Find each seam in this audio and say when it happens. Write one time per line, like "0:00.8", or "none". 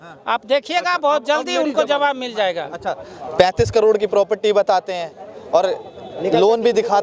none